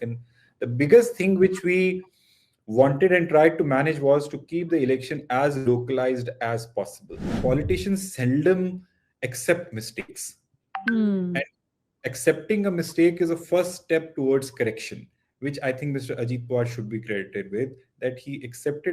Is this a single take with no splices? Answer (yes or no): no